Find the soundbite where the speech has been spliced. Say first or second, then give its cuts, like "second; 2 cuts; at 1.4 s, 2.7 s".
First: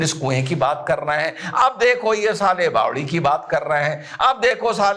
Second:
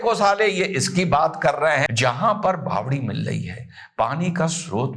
second; 1 cut; at 1.9 s